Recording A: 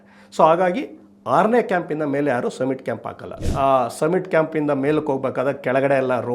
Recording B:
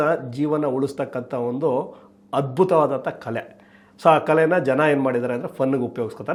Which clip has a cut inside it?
A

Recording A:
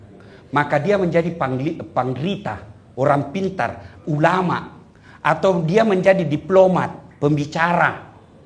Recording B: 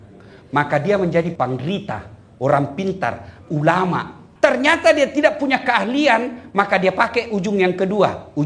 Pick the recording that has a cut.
B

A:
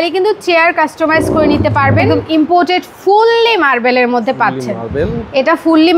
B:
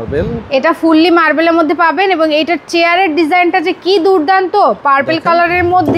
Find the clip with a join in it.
A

